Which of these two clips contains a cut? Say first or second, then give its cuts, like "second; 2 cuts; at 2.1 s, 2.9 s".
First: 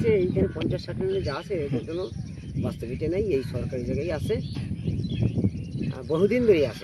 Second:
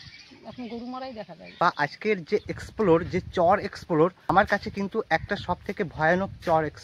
second; 2 cuts; at 1.5 s, 4.2 s